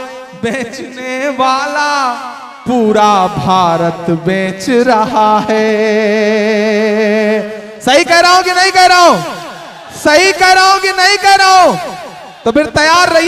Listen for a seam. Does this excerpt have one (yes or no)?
no